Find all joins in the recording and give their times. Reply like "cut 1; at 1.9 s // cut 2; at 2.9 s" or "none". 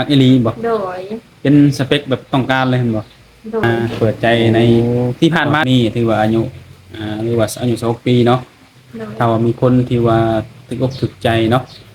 cut 1; at 3.6 s // cut 2; at 4.8 s // cut 3; at 5.7 s